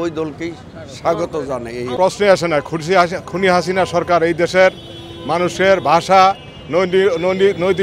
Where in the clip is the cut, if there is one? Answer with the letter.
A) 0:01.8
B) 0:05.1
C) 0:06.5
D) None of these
A